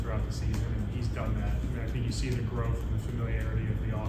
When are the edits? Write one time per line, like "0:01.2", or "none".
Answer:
none

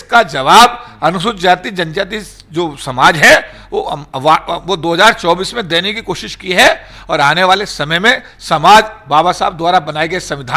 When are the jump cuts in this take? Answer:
none

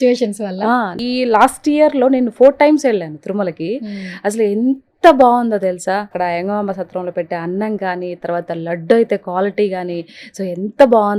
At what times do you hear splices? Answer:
0:01.0
0:06.1

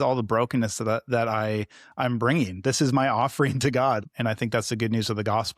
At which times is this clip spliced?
0:04.0

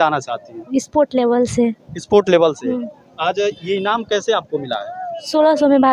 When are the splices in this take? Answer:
none

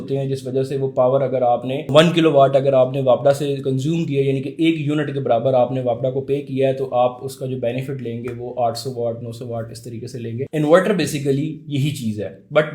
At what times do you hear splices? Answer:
0:01.9
0:10.4

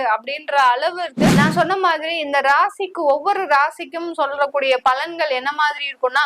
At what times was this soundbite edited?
0:01.3

